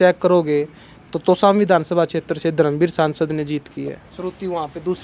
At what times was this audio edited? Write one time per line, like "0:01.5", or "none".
0:04.1